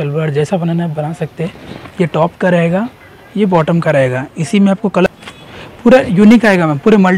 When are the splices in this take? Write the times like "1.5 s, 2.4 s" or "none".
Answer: 5.1 s